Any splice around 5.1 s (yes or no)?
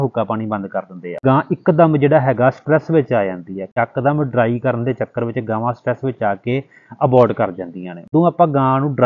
no